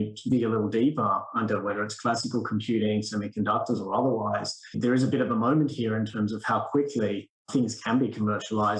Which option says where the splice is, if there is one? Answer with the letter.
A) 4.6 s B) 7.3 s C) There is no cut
B